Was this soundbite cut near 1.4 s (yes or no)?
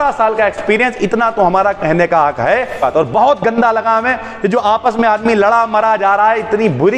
no